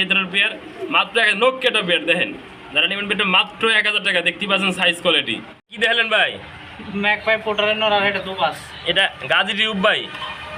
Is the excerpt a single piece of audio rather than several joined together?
yes; 0 cuts

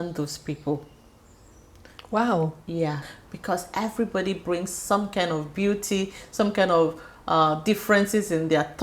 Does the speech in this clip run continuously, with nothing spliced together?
yes; 0 cuts

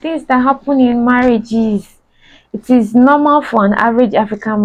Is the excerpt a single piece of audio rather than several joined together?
yes; 0 cuts

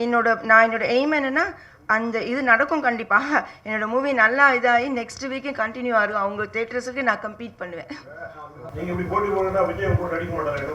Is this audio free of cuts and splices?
no; 1 cut; at 8.5 s

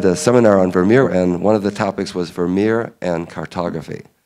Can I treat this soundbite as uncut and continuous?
no; 1 cut; at 1.1 s

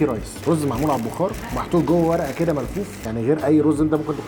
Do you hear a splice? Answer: no; 0 cuts

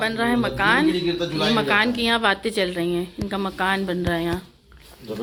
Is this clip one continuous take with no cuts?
yes; 0 cuts

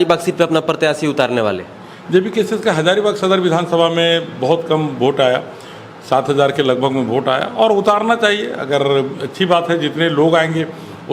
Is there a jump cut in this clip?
no; 0 cuts

